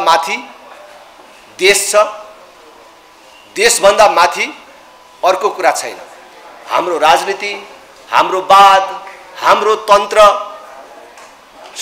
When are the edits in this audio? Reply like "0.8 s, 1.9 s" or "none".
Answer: none